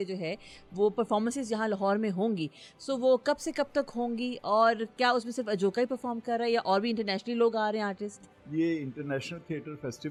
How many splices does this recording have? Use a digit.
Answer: 0